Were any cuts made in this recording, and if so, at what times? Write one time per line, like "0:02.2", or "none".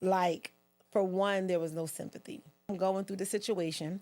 0:02.7